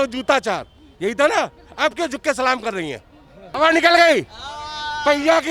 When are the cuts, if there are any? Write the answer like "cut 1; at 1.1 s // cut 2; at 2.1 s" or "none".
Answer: cut 1; at 3.5 s